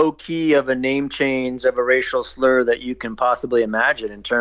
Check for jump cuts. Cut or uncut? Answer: uncut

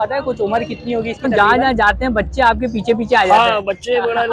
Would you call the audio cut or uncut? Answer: cut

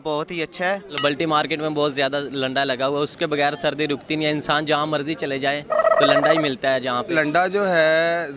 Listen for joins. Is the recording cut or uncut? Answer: cut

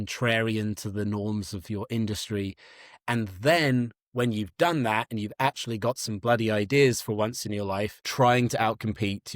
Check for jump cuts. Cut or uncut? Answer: cut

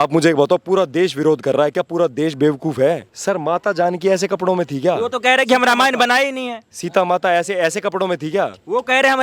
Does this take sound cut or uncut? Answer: cut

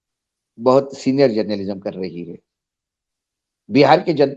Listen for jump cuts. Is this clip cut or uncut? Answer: uncut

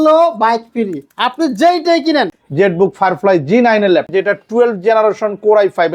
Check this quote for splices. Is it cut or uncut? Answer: cut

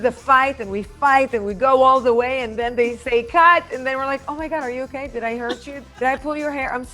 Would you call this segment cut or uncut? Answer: cut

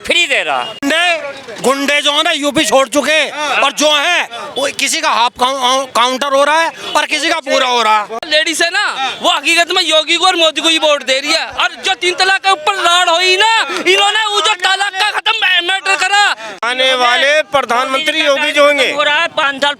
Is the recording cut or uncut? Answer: cut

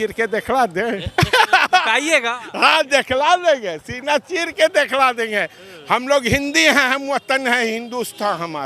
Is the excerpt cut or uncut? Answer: uncut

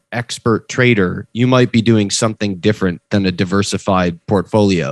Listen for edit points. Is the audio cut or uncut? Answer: uncut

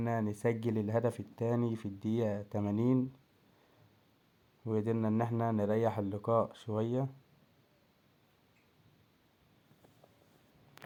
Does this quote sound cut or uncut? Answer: uncut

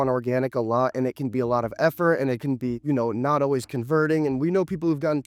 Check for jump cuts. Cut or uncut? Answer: uncut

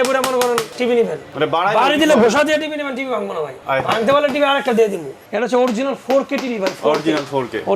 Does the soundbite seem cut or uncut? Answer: cut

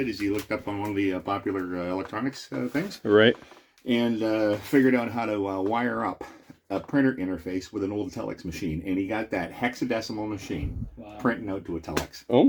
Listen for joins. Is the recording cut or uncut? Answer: uncut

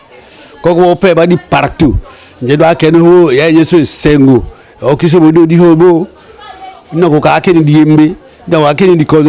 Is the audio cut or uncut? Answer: uncut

